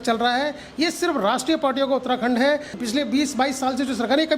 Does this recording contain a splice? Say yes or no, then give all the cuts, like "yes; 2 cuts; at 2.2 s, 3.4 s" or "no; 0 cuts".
yes; 1 cut; at 2.7 s